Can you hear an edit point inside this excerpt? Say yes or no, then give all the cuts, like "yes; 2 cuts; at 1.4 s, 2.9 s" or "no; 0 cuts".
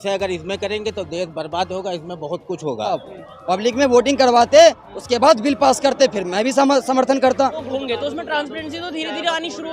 yes; 2 cuts; at 3.0 s, 7.7 s